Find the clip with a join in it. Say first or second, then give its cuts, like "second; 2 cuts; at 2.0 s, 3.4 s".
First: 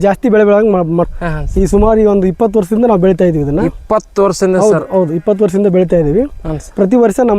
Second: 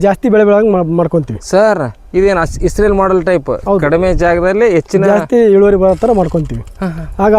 first; 1 cut; at 1.1 s